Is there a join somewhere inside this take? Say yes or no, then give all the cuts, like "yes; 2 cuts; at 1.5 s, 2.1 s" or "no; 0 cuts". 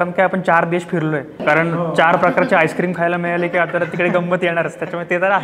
yes; 1 cut; at 1.4 s